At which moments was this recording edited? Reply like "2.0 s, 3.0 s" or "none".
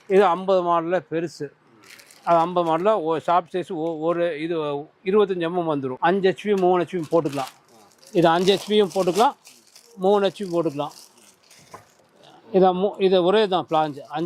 5.9 s